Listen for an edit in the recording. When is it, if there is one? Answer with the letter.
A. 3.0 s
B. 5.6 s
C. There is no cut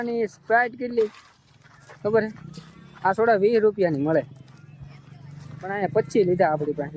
C